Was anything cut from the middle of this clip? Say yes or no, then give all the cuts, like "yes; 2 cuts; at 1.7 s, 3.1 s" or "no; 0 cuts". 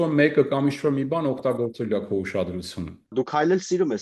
yes; 1 cut; at 3.1 s